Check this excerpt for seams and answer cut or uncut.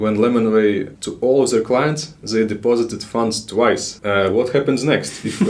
cut